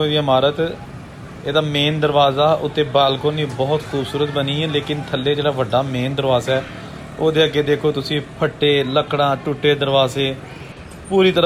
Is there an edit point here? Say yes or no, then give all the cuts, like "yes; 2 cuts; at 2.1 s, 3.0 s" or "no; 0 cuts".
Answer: no; 0 cuts